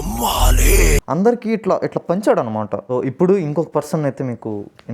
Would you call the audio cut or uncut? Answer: cut